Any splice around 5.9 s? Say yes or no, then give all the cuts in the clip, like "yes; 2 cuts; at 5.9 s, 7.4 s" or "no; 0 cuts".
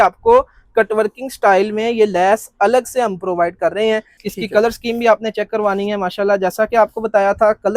no; 1 cut; at 4.2 s